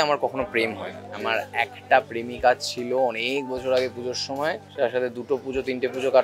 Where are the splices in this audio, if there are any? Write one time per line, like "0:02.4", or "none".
0:01.1
0:04.7

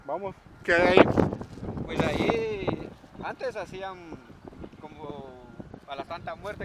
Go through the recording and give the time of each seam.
none

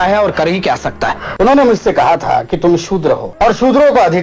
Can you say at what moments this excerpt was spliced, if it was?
0:01.2
0:03.3

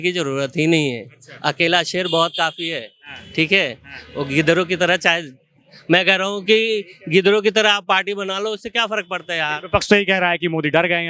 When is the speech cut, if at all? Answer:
none

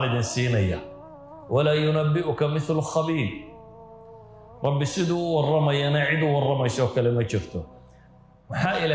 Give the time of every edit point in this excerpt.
none

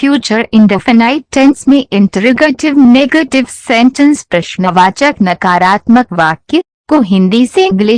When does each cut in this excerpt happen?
none

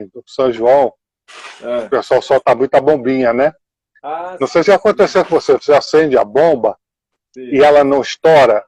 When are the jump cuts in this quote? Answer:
none

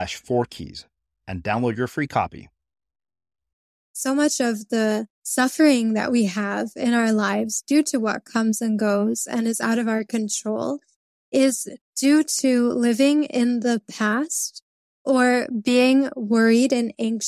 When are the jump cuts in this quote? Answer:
0:04.0
0:05.2

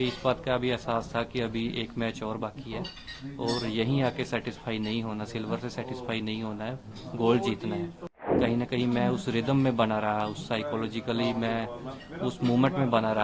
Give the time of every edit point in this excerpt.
0:08.3

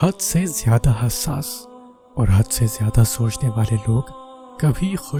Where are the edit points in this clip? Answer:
none

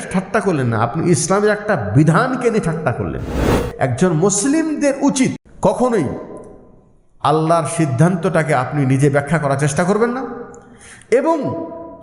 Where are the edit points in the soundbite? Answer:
0:03.6
0:05.4

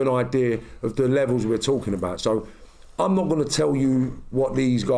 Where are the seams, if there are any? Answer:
none

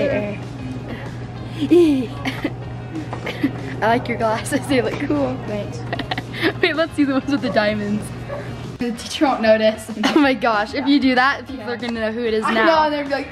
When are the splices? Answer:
0:08.7

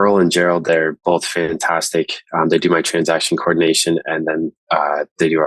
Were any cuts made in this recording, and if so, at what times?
none

